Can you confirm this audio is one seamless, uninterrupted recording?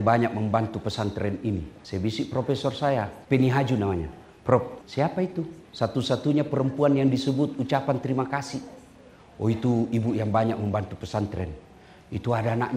no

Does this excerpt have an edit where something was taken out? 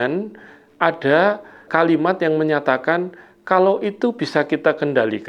yes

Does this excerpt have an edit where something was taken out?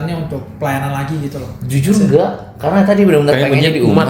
no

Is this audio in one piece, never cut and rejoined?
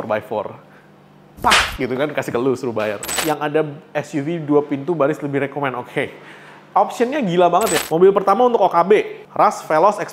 no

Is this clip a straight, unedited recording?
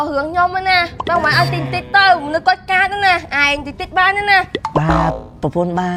yes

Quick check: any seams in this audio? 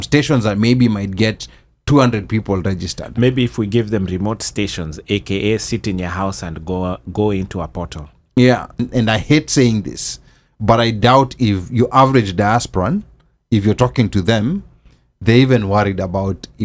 yes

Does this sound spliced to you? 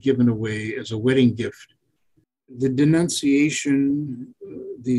yes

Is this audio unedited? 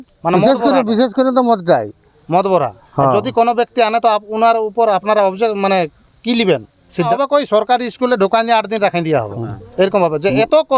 no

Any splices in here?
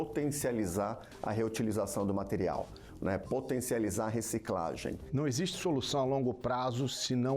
yes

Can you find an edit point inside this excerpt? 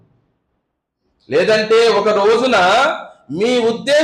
no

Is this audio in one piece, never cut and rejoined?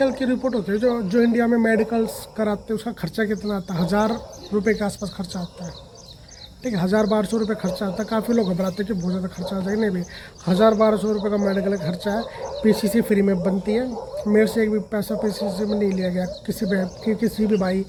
yes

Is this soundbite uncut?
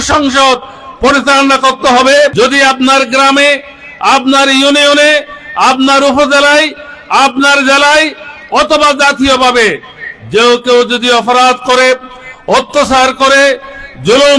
no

